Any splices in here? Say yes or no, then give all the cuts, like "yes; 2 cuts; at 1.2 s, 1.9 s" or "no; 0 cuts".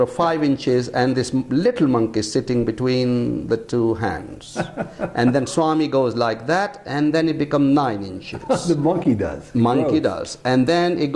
no; 0 cuts